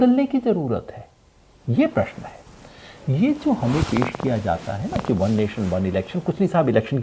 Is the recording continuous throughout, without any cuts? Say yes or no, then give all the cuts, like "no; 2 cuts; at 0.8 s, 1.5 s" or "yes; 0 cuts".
yes; 0 cuts